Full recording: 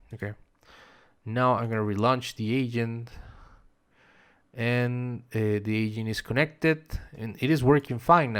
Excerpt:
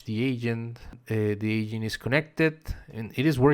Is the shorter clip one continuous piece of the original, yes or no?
no